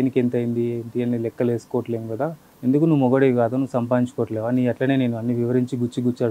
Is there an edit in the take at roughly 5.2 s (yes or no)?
no